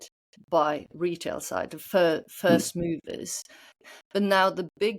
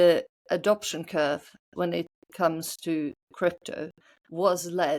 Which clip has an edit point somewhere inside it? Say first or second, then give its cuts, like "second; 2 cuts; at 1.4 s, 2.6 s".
first; 1 cut; at 3.8 s